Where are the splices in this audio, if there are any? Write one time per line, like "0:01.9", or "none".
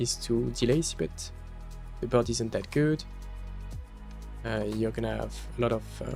none